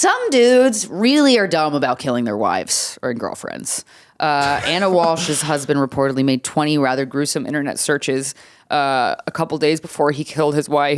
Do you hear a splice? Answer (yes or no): no